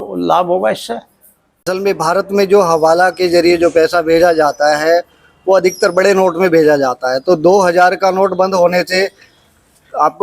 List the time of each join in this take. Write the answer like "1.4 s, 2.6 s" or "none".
1.7 s

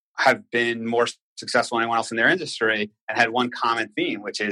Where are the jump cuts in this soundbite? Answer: none

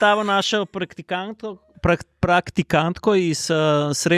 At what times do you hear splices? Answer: none

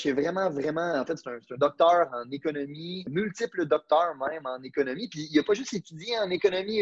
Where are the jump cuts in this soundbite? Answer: 3.1 s

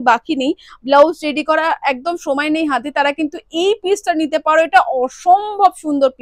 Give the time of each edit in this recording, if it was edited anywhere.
none

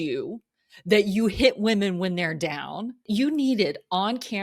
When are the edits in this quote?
3.0 s

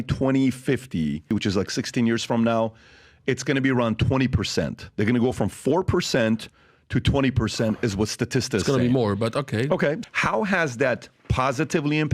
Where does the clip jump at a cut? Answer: 1.2 s, 10.0 s

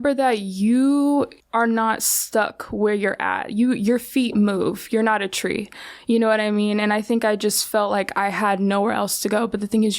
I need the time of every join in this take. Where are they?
1.4 s

